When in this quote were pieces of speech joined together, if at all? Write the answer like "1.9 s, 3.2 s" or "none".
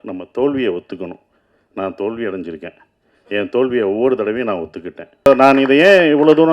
5.2 s